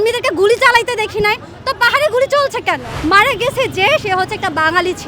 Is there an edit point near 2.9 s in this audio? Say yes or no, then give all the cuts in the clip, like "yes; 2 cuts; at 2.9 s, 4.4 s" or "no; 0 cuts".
yes; 1 cut; at 2.9 s